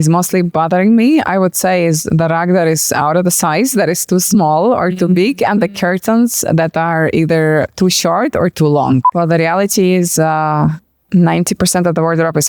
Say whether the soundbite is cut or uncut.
cut